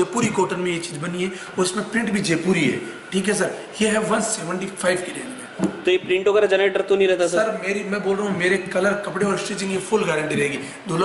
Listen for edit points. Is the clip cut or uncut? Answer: uncut